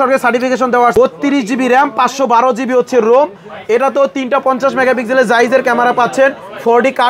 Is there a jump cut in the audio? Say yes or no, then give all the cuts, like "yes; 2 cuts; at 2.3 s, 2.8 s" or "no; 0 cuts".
yes; 1 cut; at 0.9 s